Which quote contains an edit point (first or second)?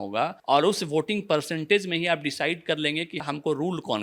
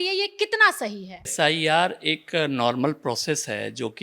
second